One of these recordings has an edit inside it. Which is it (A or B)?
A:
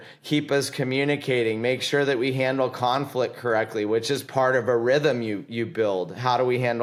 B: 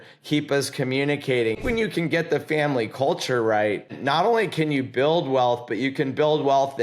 B